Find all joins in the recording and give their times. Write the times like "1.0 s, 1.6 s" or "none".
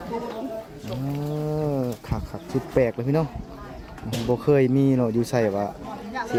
none